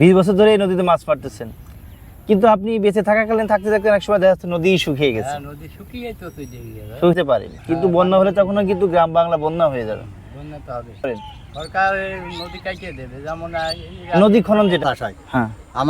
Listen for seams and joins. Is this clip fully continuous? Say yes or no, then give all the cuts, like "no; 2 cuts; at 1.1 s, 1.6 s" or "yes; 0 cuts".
no; 3 cuts; at 7.2 s, 11.2 s, 14.8 s